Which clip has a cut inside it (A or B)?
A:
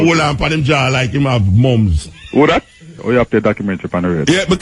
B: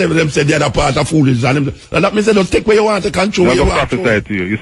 A